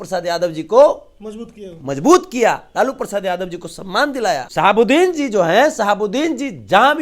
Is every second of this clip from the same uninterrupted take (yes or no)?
no